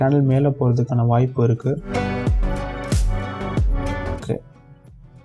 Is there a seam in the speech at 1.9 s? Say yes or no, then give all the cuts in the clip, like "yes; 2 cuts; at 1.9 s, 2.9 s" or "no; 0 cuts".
no; 0 cuts